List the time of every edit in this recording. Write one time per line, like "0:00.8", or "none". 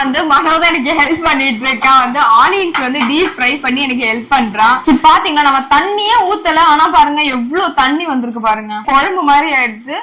0:04.8